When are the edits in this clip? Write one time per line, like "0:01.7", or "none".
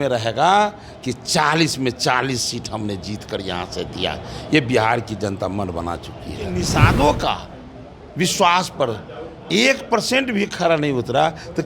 0:06.7